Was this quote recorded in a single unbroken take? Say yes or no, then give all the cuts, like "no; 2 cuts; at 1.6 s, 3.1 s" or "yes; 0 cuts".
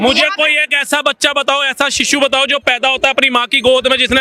yes; 0 cuts